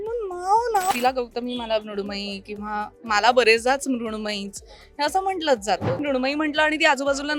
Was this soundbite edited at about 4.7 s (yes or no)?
no